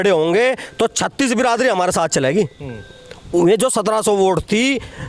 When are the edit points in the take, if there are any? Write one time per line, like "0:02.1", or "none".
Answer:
none